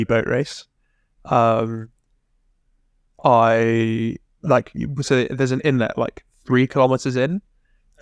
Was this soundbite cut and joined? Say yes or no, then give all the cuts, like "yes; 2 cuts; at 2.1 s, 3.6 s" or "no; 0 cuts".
no; 0 cuts